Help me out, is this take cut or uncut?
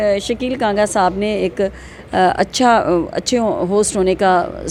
uncut